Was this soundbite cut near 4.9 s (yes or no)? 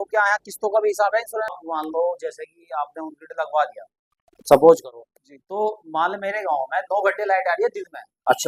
no